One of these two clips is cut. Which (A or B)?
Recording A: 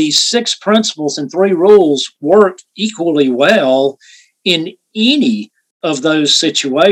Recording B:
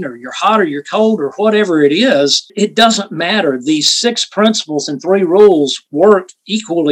B